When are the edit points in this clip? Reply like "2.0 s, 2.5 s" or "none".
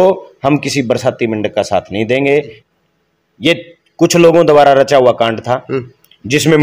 2.6 s